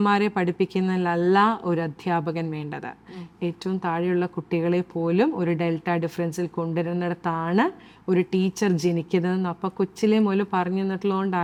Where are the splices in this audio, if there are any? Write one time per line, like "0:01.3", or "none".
none